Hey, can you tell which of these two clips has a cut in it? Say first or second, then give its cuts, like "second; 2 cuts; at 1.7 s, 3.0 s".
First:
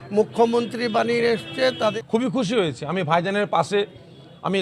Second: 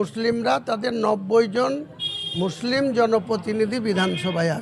first; 1 cut; at 1.9 s